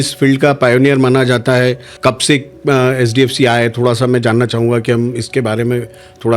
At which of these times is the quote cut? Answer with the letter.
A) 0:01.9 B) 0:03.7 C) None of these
A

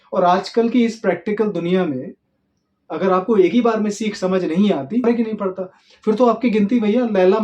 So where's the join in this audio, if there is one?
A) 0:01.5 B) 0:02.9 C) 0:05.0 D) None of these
C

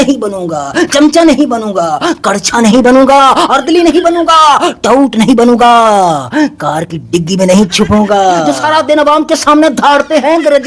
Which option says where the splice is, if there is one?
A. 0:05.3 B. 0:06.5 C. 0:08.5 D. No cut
C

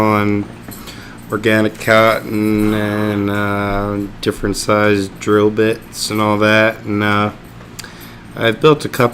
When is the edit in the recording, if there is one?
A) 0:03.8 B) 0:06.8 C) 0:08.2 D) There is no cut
B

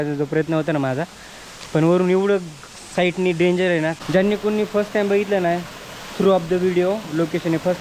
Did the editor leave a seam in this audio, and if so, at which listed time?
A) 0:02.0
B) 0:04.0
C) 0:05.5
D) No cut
B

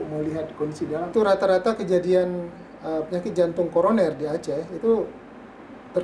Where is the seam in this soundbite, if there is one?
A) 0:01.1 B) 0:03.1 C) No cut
A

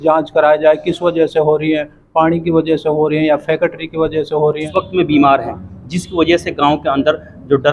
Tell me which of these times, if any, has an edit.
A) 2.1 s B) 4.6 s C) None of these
B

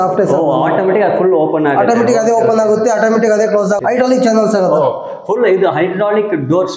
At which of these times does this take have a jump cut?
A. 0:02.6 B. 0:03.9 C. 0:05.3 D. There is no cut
B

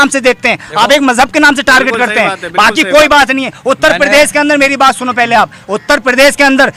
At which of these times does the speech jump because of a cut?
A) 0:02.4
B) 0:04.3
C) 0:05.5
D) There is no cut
D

